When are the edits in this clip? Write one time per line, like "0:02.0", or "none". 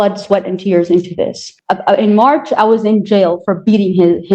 0:01.5